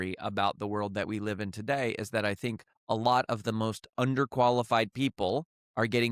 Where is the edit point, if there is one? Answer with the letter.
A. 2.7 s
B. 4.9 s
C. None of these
A